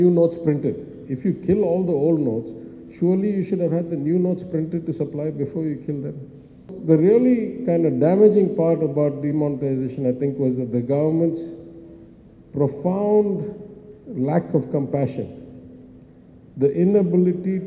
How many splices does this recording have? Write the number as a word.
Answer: one